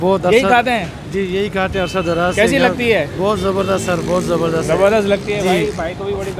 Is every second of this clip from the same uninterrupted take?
yes; 0 cuts

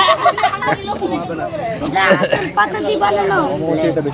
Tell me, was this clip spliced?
no; 0 cuts

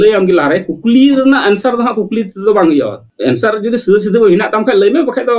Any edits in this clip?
no; 0 cuts

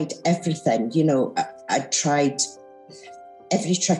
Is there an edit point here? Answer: no; 0 cuts

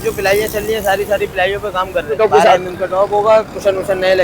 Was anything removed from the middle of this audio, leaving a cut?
yes; 1 cut; at 2.1 s

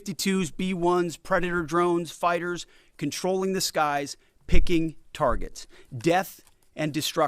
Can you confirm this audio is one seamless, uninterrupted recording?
yes; 0 cuts

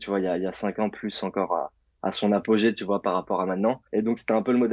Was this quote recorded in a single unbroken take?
no; 1 cut; at 3.8 s

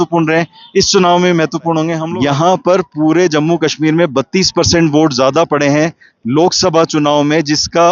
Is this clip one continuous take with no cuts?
no; 1 cut; at 2.0 s

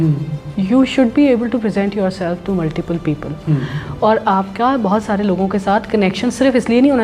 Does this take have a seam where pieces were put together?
no; 0 cuts

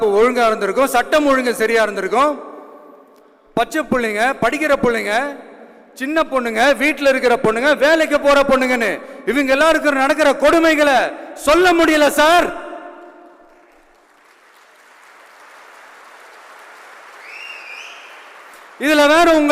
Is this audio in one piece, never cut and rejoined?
yes; 0 cuts

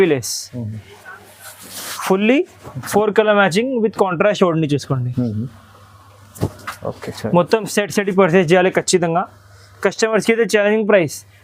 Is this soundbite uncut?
yes; 0 cuts

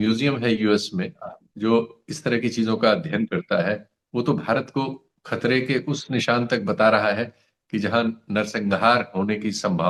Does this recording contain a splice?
no; 0 cuts

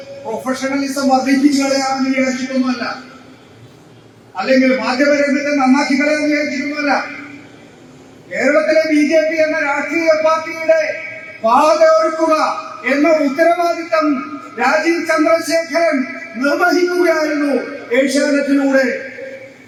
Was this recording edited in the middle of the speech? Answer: no; 0 cuts

